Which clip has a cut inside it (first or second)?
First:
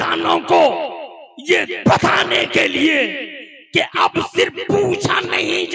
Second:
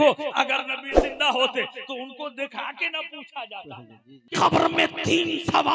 second